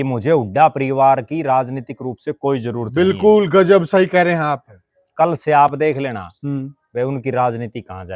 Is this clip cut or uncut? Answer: uncut